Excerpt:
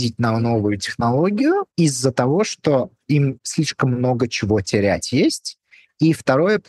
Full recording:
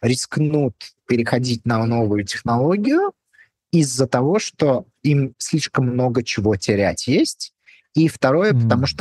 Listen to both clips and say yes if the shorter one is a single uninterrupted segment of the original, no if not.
no